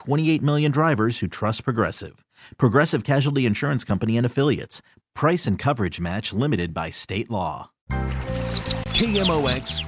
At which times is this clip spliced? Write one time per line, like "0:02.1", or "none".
0:07.9